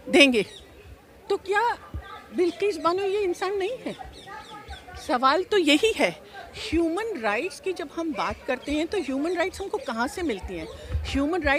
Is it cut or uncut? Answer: uncut